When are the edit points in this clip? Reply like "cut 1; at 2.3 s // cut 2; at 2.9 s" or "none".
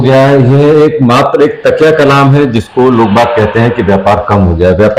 none